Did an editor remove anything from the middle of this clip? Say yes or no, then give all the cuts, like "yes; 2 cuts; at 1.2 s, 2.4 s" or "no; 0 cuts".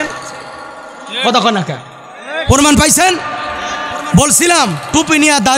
no; 0 cuts